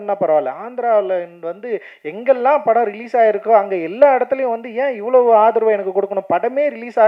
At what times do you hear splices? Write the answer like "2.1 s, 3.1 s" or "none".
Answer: none